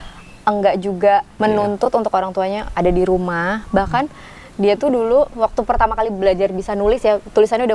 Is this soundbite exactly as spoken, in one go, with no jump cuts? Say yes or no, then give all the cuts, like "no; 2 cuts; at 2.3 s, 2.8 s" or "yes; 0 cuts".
no; 1 cut; at 1.3 s